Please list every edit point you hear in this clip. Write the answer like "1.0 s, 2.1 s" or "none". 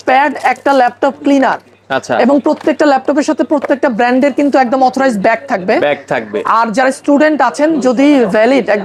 none